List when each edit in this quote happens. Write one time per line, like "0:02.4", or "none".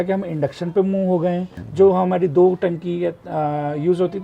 0:01.6